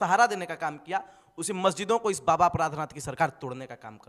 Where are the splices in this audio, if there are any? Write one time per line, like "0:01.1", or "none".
none